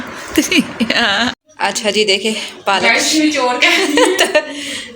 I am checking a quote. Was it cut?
yes; 1 cut; at 1.4 s

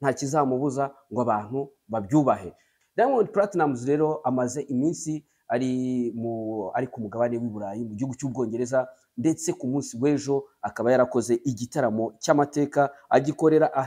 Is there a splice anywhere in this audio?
yes; 1 cut; at 2.7 s

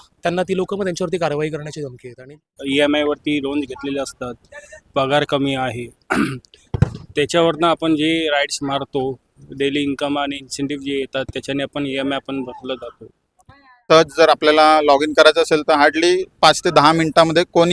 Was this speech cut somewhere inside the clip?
yes; 2 cuts; at 2.6 s, 13.7 s

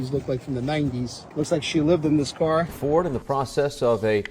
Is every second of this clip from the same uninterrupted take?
no; 2 cuts; at 1.2 s, 2.7 s

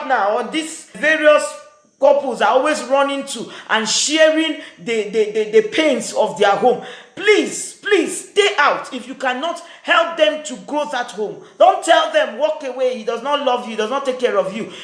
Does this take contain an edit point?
yes; 1 cut; at 0.9 s

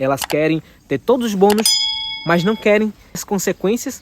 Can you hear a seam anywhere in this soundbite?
no; 0 cuts

